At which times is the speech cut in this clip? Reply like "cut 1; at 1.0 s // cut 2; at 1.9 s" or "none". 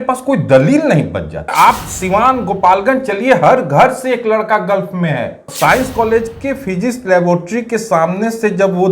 cut 1; at 1.5 s // cut 2; at 5.5 s